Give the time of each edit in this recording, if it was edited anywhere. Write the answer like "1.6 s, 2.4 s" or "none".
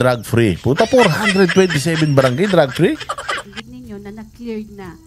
3.4 s